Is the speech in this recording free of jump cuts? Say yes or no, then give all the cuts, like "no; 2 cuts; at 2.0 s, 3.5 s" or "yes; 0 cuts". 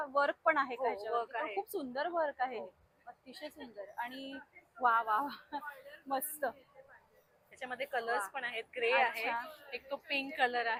yes; 0 cuts